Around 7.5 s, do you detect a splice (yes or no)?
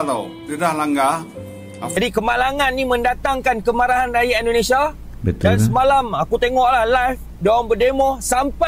no